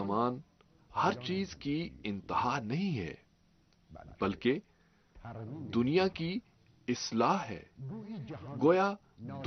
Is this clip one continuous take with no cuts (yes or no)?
no